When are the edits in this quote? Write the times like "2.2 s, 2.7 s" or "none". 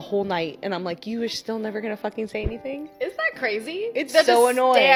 none